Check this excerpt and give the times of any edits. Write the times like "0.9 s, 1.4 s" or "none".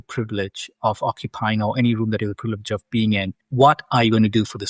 3.4 s

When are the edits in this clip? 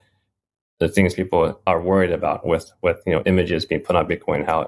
1.6 s

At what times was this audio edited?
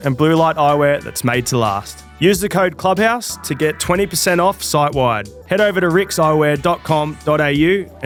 none

